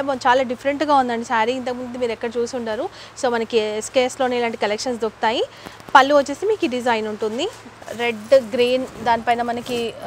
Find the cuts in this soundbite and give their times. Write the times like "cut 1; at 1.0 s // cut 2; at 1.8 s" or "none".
none

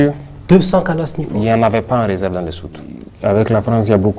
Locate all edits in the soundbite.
cut 1; at 3.0 s

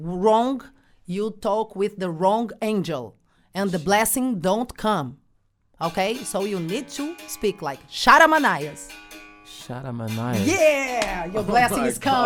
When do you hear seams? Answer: none

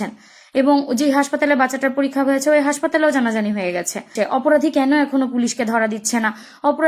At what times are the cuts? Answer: cut 1; at 4.1 s

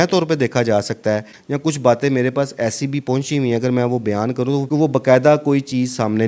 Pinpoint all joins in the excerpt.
cut 1; at 1.3 s // cut 2; at 4.6 s

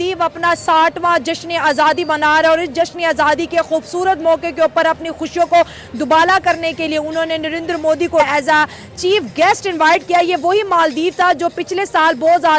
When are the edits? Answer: cut 1; at 8.2 s

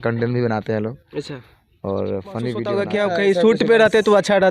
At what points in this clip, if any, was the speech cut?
cut 1; at 2.7 s

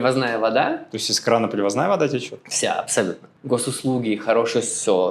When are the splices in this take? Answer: cut 1; at 3.3 s

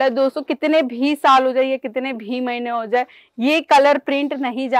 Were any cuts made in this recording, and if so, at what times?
none

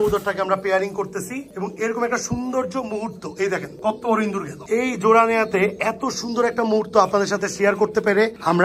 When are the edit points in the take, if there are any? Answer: none

